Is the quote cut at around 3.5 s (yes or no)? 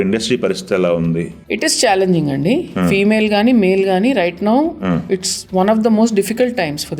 no